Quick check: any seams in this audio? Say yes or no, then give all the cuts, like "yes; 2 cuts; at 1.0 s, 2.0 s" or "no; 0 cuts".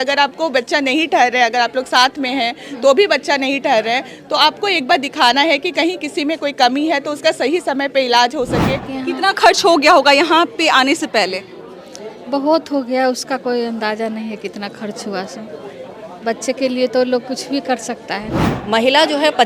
yes; 2 cuts; at 8.9 s, 18.5 s